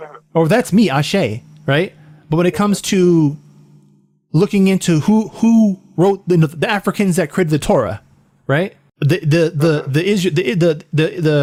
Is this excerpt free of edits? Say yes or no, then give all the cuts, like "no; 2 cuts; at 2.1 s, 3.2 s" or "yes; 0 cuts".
yes; 0 cuts